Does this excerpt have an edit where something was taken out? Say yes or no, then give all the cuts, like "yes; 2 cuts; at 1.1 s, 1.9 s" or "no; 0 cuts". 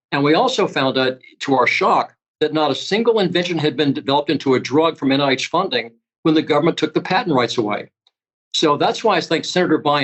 yes; 1 cut; at 2.2 s